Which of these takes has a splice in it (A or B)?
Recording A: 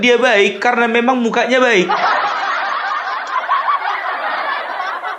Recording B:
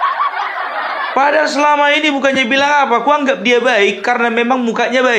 B